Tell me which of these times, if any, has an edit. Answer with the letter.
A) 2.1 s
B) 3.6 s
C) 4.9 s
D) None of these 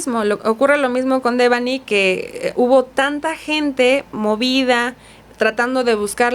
D